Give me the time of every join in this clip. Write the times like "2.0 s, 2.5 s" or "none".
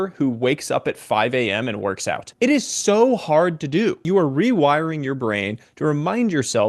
2.2 s, 4.0 s